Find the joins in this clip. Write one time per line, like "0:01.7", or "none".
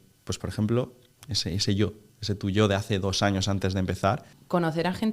0:04.2